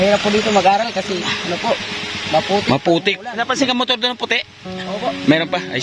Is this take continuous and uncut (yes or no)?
no